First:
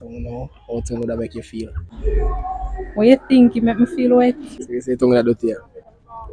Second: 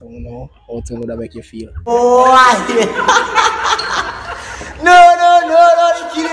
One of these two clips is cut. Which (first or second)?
first